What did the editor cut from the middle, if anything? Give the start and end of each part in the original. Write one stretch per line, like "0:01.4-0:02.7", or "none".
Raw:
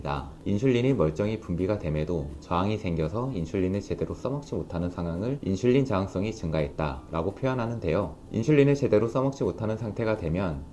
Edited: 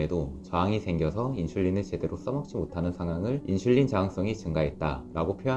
none